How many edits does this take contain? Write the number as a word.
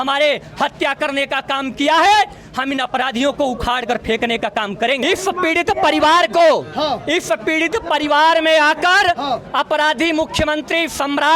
one